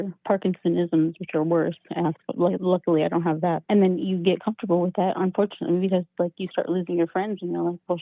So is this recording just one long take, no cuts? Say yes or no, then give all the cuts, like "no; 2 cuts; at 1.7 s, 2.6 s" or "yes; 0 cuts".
yes; 0 cuts